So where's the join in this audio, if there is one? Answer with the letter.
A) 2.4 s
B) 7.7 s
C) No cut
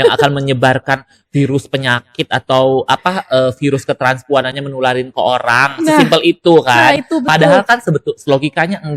C